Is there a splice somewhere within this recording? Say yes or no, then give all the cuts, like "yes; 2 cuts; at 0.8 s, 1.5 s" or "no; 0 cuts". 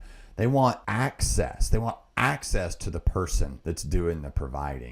yes; 2 cuts; at 0.8 s, 3.6 s